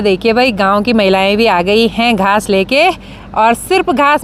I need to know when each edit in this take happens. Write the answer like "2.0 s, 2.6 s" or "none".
none